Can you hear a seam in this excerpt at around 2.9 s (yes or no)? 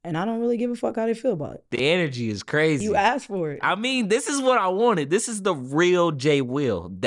no